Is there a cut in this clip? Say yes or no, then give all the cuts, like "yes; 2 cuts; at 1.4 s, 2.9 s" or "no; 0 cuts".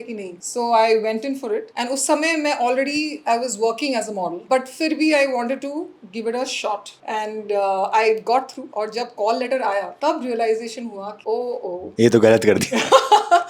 yes; 3 cuts; at 4.4 s, 6.9 s, 8.6 s